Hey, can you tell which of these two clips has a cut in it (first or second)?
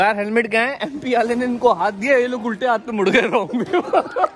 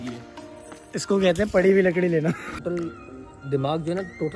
second